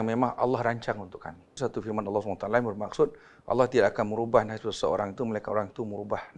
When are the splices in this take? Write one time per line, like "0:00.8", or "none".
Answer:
0:01.6